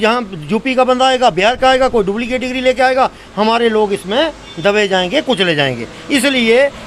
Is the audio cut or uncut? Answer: uncut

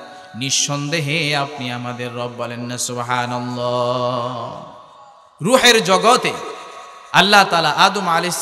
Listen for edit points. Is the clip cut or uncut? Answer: uncut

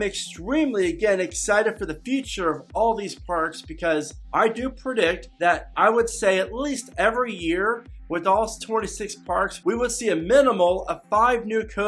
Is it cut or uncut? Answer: cut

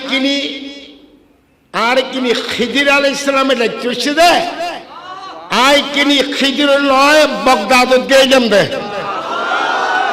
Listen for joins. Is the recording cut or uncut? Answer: uncut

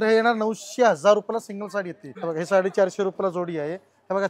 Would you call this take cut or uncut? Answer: cut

